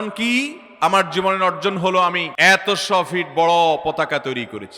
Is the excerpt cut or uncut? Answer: cut